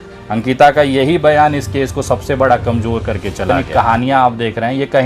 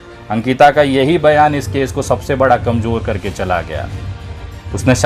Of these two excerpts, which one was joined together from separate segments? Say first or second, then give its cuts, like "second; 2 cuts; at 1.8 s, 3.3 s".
first; 1 cut; at 3.6 s